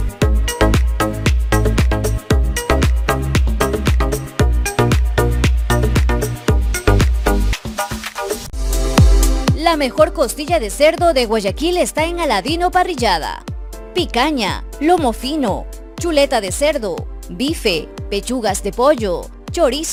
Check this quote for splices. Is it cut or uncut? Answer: uncut